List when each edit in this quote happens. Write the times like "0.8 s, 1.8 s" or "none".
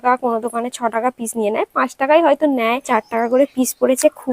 2.9 s